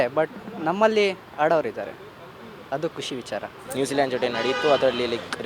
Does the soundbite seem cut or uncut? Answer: cut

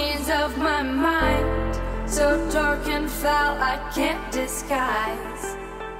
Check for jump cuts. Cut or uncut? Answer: uncut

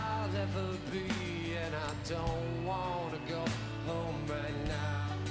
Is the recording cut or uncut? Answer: uncut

